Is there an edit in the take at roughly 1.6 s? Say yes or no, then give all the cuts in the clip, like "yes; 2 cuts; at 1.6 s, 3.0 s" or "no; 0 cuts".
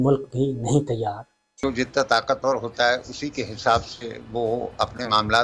yes; 1 cut; at 1.6 s